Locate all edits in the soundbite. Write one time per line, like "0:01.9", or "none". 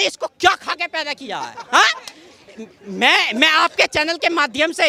none